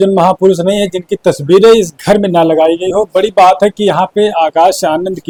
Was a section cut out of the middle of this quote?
no; 0 cuts

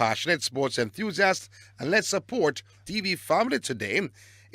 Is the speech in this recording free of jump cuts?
no; 1 cut; at 2.8 s

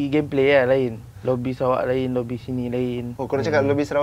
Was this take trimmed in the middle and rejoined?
yes; 2 cuts; at 1.1 s, 3.1 s

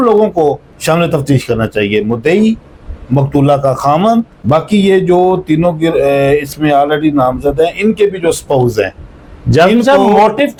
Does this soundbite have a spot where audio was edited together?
no; 0 cuts

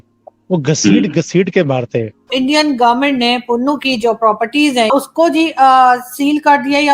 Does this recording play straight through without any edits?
no; 2 cuts; at 2.3 s, 4.9 s

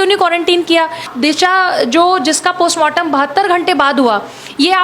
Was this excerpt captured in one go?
no; 1 cut; at 1.1 s

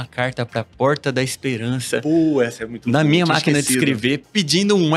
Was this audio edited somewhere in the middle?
no; 0 cuts

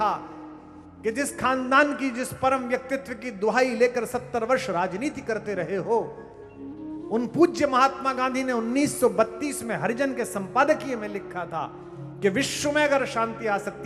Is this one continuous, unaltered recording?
yes; 0 cuts

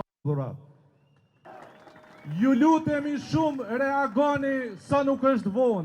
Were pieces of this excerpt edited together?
yes; 1 cut; at 1.4 s

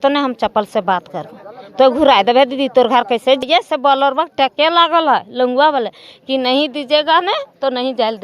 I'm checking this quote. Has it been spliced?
yes; 1 cut; at 3.4 s

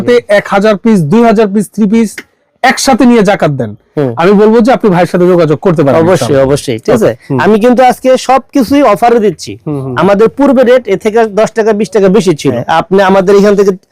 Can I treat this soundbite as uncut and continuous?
no; 2 cuts; at 7.2 s, 12.6 s

